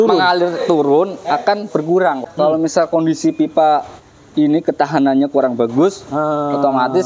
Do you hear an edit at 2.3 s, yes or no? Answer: yes